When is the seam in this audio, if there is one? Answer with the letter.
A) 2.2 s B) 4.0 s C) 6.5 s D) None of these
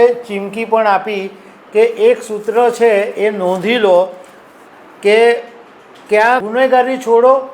C